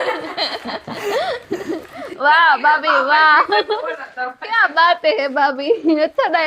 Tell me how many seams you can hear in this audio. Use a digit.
0